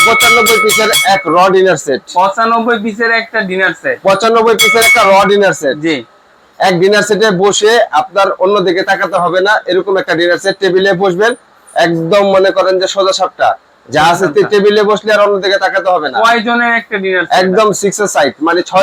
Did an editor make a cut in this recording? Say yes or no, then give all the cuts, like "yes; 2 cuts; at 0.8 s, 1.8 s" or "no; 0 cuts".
no; 0 cuts